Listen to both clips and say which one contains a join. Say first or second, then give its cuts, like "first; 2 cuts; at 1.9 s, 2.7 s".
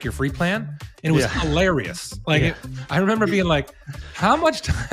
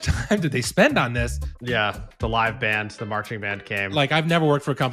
second; 2 cuts; at 1.6 s, 3.9 s